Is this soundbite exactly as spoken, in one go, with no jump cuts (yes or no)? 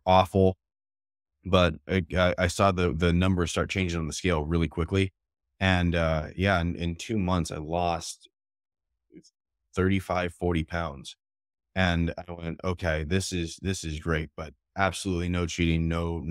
yes